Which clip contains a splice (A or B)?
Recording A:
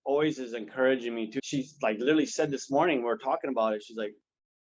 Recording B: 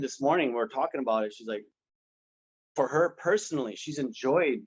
A